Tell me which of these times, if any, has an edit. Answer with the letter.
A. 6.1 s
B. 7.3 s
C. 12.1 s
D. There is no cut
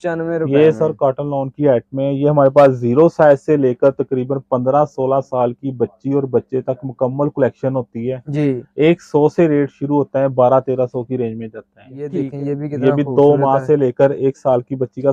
C